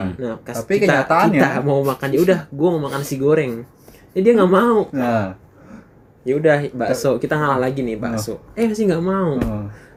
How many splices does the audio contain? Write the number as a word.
zero